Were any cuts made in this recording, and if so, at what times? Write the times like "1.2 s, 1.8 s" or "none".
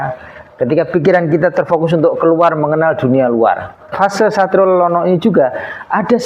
3.9 s